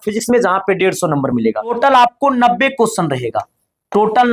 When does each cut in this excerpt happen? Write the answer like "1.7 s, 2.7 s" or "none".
1.7 s